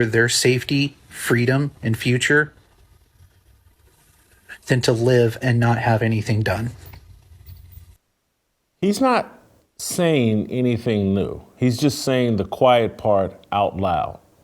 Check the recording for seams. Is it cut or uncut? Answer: cut